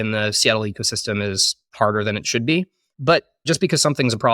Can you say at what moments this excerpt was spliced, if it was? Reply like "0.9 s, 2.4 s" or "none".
3.1 s